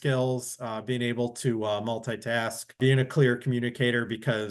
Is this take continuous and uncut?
no; 1 cut; at 2.8 s

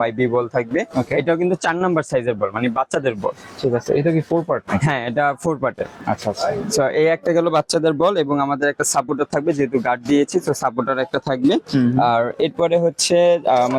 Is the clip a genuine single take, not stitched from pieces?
yes; 0 cuts

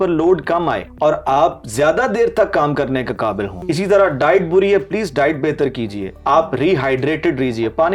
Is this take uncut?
no; 3 cuts; at 0.9 s, 3.6 s, 6.1 s

